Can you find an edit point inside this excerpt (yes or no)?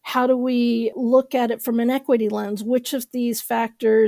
yes